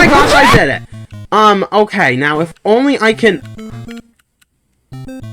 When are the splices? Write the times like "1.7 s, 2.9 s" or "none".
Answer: none